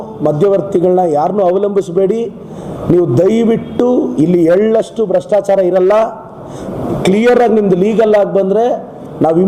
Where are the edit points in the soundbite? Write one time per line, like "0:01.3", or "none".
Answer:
none